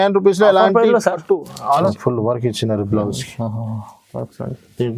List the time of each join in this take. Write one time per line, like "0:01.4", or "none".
0:01.9